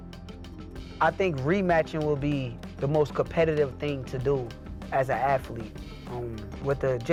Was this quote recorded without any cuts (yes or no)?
yes